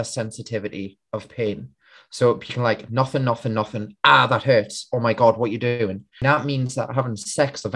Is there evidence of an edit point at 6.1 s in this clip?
yes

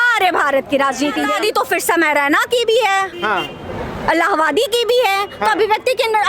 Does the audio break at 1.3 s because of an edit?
yes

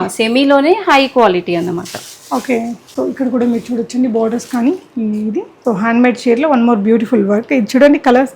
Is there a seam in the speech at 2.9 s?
no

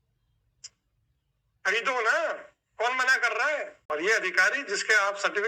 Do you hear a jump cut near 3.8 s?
yes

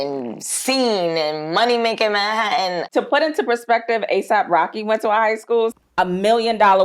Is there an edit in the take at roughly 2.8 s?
yes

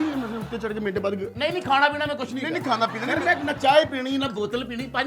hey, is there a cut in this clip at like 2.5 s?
no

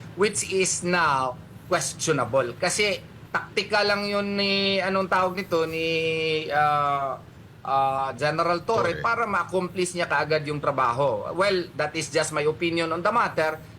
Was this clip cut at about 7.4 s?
no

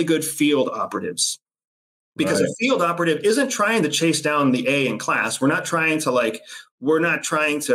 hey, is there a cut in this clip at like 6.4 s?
no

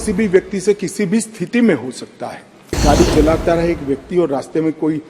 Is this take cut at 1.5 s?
no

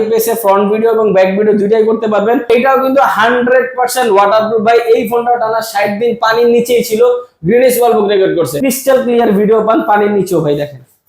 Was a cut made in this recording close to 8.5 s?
yes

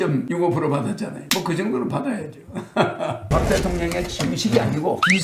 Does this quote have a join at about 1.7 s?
no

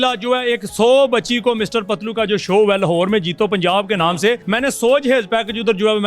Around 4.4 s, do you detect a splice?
yes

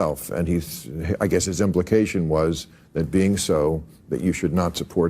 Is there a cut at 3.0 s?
yes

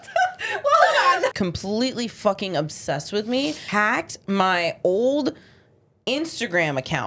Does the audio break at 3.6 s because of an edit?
yes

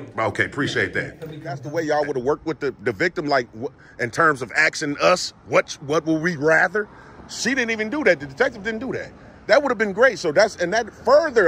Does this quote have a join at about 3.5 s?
no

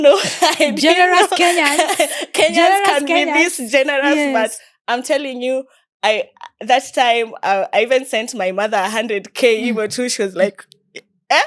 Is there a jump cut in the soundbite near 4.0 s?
no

